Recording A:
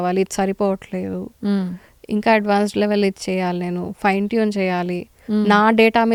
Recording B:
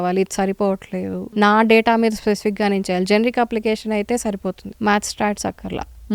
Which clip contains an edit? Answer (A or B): B